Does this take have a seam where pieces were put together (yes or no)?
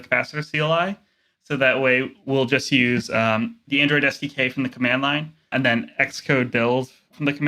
yes